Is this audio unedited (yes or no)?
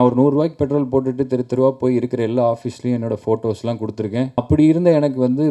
no